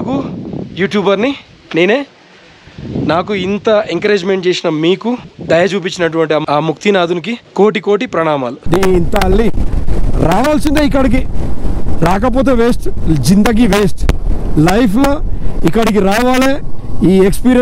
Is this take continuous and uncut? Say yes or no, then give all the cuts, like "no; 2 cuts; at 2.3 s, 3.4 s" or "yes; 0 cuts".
no; 1 cut; at 8.6 s